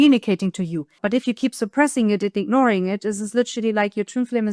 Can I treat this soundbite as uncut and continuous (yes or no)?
no